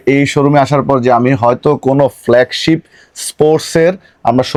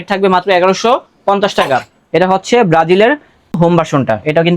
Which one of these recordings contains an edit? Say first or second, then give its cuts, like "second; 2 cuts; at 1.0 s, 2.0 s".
second; 1 cut; at 3.6 s